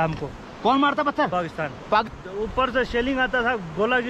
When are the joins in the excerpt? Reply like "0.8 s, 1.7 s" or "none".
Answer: 2.0 s

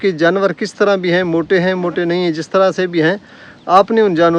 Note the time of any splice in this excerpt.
none

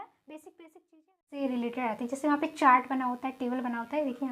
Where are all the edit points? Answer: 1.3 s

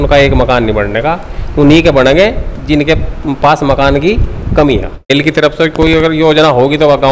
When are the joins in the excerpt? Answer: 5.1 s

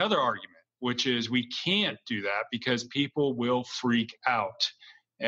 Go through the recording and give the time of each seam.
none

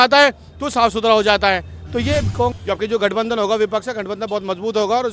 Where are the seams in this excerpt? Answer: 2.5 s

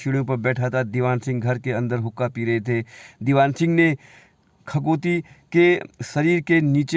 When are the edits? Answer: none

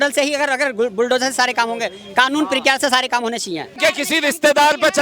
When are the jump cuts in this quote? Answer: 3.7 s

